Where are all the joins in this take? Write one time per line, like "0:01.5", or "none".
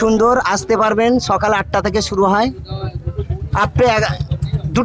none